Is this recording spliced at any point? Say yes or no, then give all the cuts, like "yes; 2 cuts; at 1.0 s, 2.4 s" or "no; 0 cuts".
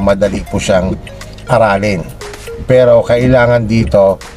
no; 0 cuts